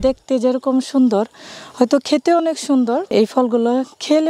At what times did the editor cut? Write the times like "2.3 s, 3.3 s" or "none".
3.1 s